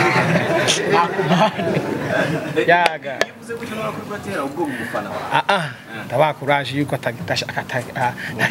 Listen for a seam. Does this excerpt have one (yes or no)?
no